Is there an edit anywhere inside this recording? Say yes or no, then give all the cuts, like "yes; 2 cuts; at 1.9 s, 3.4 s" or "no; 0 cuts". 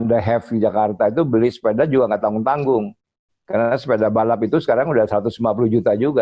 no; 0 cuts